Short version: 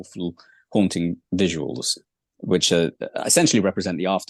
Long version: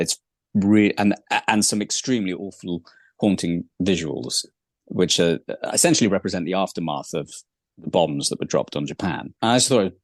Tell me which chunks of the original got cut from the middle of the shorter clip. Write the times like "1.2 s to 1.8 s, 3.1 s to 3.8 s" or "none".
none